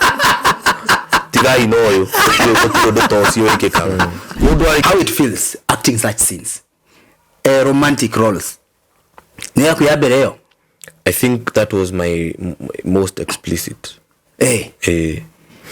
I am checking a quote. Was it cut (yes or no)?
yes